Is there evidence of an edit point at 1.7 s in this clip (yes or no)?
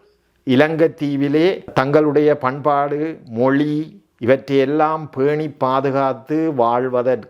yes